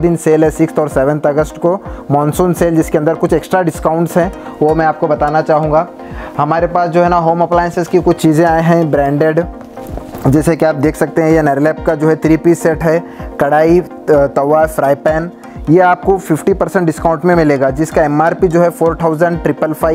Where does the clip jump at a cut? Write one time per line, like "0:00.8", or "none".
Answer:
none